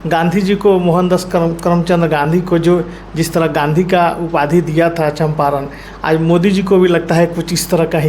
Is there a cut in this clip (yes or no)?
no